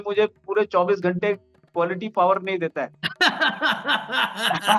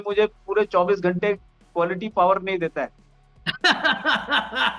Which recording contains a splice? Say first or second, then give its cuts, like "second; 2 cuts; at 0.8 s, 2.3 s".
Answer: first; 1 cut; at 3.0 s